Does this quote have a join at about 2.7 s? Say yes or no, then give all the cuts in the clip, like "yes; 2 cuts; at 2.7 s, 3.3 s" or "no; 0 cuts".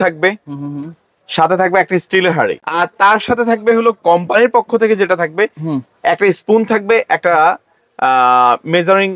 yes; 1 cut; at 2.7 s